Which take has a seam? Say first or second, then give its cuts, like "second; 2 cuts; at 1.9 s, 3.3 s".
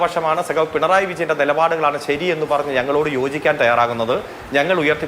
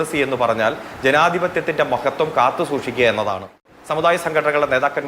second; 1 cut; at 3.7 s